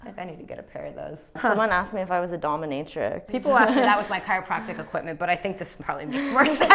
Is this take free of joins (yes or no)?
no